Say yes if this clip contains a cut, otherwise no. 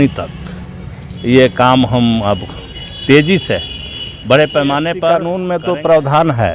yes